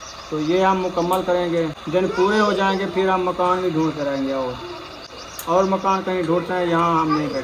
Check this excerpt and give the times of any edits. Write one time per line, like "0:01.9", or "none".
0:01.8